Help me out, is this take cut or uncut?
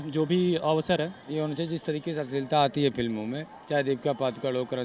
cut